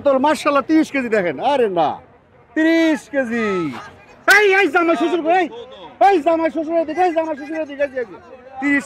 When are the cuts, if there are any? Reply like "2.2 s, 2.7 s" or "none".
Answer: none

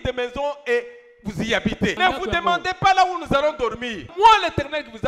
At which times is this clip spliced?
2.0 s, 4.0 s

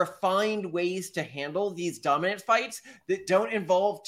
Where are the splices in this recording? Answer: none

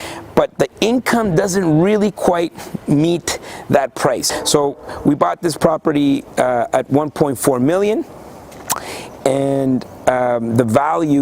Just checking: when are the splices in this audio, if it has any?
4.3 s

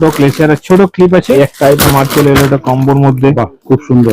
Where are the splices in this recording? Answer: 1.4 s

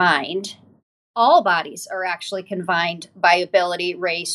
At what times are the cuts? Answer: 1.1 s

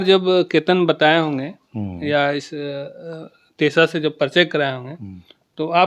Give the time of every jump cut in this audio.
none

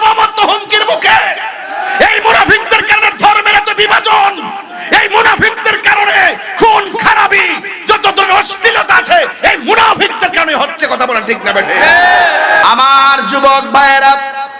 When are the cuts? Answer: 12.6 s

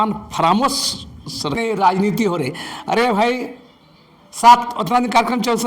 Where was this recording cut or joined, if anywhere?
1.6 s

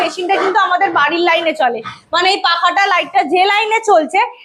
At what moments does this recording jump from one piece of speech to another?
none

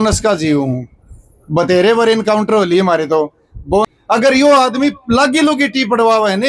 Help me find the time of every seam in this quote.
3.9 s

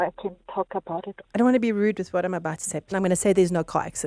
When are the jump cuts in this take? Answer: 1.2 s, 2.9 s

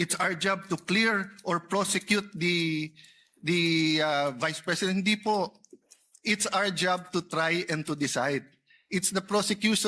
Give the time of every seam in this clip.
none

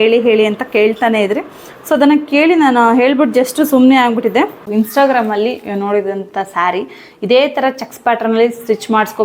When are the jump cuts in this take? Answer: 4.6 s

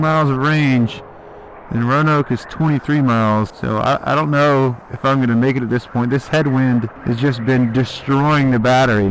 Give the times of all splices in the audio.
3.6 s, 6.9 s

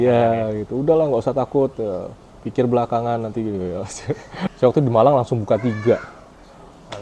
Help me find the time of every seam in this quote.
4.5 s

